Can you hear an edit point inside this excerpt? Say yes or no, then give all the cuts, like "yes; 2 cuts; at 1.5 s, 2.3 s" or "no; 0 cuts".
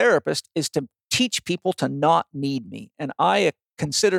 no; 0 cuts